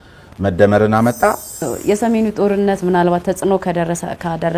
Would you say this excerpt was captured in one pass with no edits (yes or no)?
no